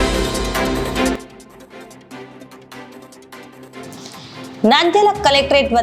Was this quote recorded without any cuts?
no; 2 cuts; at 1.2 s, 3.9 s

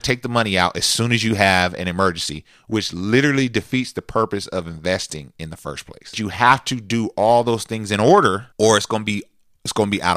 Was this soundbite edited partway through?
yes; 2 cuts; at 6.2 s, 8.5 s

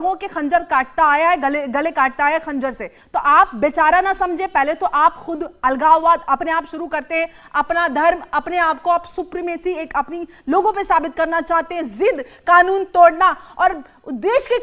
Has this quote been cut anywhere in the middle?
no; 0 cuts

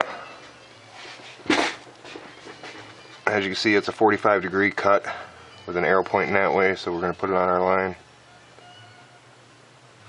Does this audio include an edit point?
yes; 1 cut; at 1.1 s

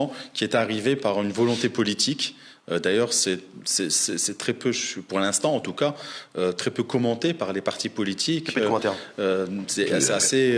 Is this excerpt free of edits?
yes; 0 cuts

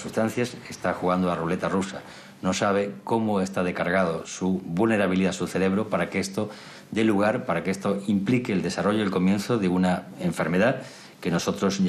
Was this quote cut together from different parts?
no; 0 cuts

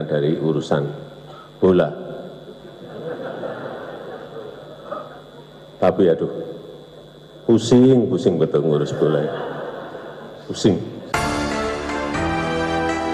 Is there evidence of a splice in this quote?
yes; 1 cut; at 11.1 s

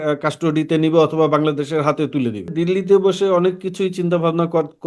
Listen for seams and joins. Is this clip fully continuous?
no; 1 cut; at 2.5 s

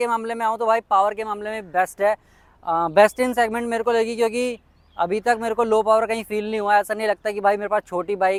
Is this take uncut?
yes; 0 cuts

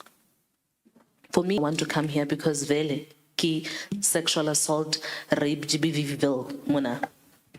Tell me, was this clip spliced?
yes; 1 cut; at 1.6 s

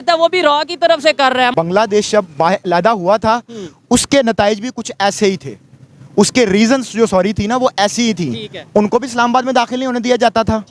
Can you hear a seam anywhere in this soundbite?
yes; 1 cut; at 1.5 s

